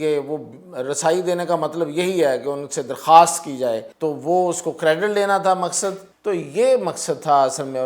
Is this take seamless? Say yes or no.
no